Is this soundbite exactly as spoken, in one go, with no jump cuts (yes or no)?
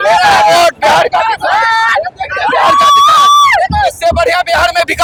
yes